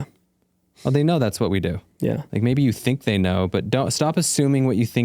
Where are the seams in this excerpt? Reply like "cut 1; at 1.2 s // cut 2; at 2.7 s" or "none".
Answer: cut 1; at 2.2 s